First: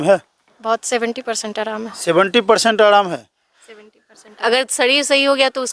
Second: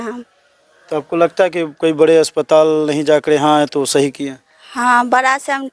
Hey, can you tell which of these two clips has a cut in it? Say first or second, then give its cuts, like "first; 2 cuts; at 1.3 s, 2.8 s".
first; 1 cut; at 4.4 s